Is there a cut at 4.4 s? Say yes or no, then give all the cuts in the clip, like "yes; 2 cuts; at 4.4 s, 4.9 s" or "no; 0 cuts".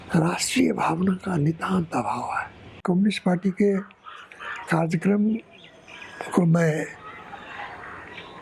no; 1 cut; at 2.8 s